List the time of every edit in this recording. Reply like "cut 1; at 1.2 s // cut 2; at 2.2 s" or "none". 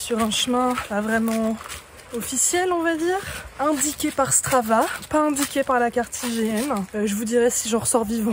cut 1; at 3.4 s // cut 2; at 6.9 s